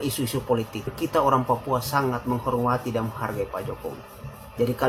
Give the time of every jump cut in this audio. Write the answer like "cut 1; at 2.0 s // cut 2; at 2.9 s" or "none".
cut 1; at 0.9 s